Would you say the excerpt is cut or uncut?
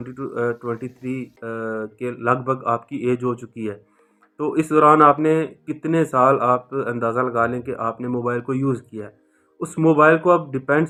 uncut